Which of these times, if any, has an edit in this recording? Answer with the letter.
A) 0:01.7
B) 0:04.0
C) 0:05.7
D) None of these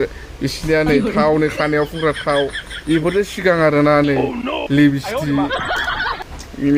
D